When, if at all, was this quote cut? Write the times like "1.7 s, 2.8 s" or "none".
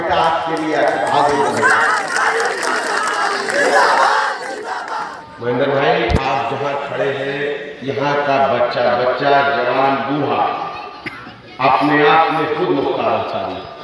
4.9 s